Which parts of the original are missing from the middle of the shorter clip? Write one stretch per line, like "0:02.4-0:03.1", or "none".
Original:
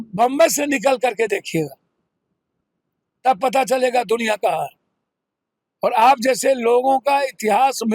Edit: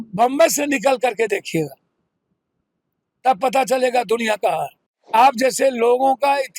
0:05.1-0:05.9